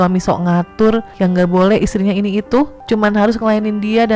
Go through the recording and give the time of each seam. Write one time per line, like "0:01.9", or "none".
0:01.1
0:02.8